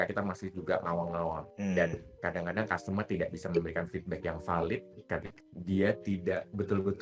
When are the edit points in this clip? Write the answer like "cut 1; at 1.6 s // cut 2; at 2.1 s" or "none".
cut 1; at 1.5 s // cut 2; at 5.3 s

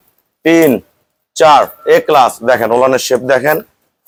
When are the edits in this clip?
none

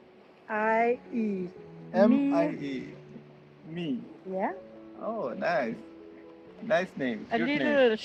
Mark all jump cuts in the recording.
none

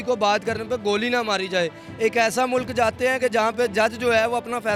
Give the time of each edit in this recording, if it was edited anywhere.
none

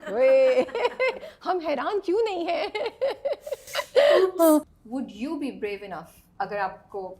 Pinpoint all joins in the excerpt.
cut 1; at 4.8 s // cut 2; at 6.2 s

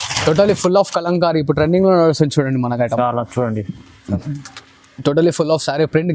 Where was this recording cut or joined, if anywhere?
none

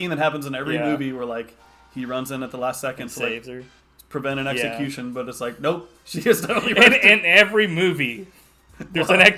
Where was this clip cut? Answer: none

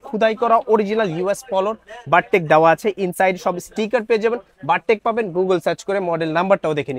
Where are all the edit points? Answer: none

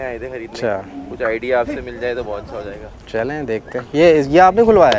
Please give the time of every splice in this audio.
none

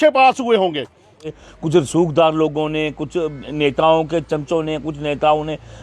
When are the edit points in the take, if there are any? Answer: cut 1; at 1.1 s

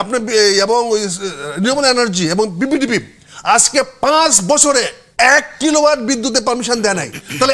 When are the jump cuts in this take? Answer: none

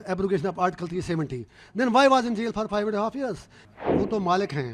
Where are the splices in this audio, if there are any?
cut 1; at 3.6 s

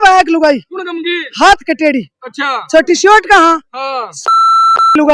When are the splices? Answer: none

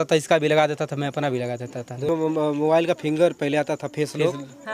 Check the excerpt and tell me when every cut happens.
cut 1; at 2.1 s

